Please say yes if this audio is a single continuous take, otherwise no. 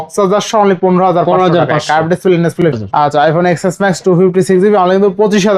no